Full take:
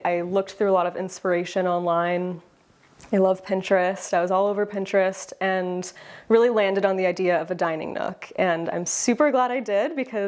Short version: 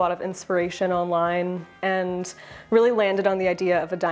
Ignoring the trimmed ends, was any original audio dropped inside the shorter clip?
yes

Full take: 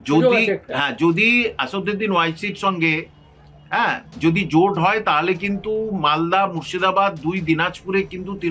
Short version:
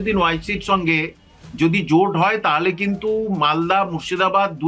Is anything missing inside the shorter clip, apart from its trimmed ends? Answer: yes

